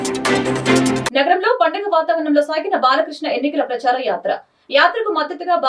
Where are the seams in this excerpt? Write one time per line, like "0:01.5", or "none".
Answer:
0:01.1